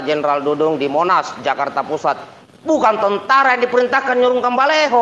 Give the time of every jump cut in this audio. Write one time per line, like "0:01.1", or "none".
0:01.9